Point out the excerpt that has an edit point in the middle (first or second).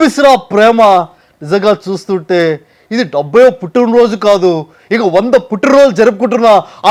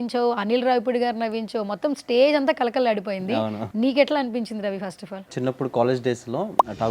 second